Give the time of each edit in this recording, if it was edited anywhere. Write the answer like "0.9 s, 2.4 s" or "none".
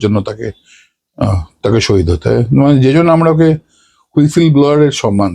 none